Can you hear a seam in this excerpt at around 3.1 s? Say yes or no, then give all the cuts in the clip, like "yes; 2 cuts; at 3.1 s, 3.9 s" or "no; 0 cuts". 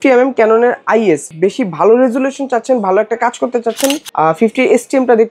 no; 1 cut; at 1.3 s